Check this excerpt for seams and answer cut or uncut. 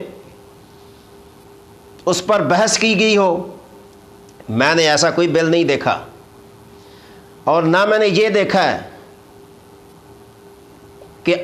uncut